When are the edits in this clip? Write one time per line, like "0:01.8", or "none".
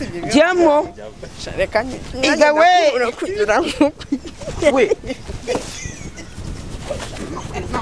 none

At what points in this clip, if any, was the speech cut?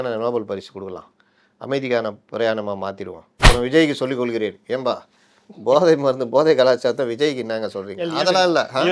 0:03.5

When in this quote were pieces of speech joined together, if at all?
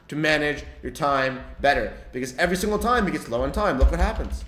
none

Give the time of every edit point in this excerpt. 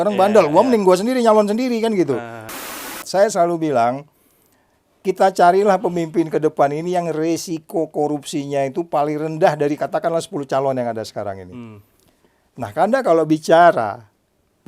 0:02.6

